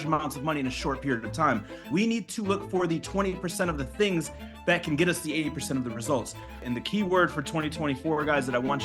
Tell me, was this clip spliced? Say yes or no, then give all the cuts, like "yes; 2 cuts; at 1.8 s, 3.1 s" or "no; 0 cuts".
yes; 2 cuts; at 1.9 s, 6.6 s